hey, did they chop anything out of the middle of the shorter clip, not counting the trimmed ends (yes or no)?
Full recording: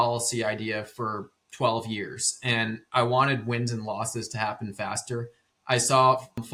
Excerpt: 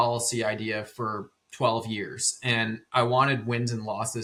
no